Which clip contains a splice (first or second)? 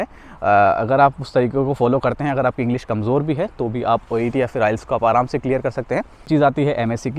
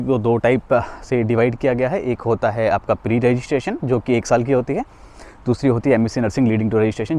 first